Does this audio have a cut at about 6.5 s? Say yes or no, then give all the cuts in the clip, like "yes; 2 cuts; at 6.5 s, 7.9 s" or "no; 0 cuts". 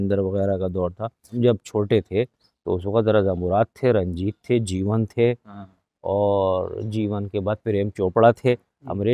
no; 1 cut; at 1.3 s